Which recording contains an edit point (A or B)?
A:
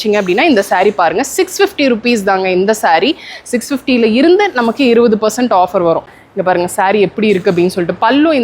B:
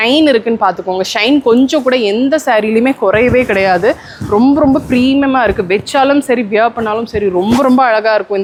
A